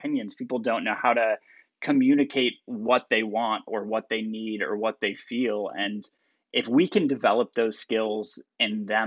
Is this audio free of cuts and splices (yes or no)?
yes